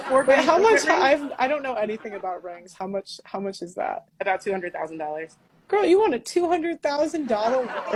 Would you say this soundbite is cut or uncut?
uncut